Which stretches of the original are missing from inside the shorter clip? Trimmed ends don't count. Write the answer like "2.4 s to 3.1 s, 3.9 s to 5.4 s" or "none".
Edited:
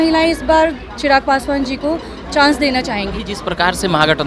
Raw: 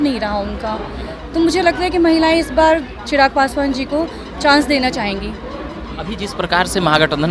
5.2 s to 6.1 s